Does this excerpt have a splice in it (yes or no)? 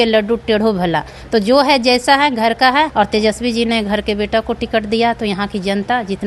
yes